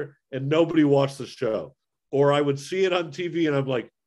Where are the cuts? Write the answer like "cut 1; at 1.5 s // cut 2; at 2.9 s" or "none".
cut 1; at 1.8 s